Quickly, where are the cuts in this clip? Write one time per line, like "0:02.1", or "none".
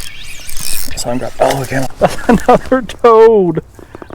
0:01.9